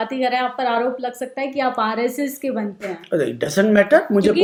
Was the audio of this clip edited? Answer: no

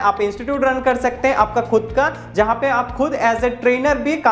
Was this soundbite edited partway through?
no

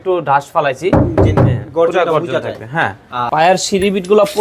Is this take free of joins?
no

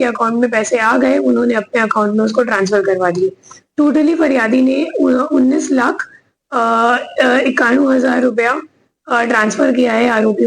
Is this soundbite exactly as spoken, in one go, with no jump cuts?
yes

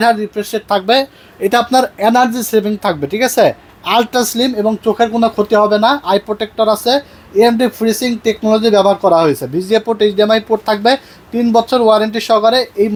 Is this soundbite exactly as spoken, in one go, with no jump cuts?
yes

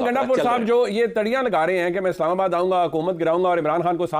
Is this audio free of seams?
yes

